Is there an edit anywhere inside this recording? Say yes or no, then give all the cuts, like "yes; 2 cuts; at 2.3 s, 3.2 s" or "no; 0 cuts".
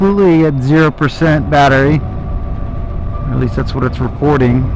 no; 0 cuts